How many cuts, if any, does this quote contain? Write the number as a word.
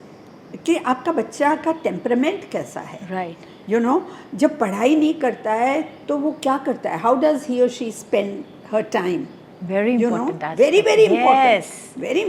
zero